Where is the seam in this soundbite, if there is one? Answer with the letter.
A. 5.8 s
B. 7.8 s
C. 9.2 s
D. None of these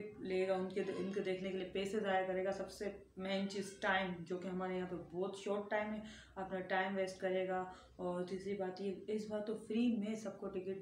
D